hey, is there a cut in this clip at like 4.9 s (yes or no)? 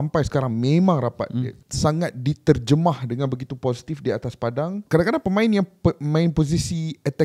yes